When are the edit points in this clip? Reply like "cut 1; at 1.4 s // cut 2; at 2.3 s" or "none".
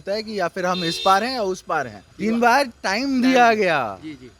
cut 1; at 2.0 s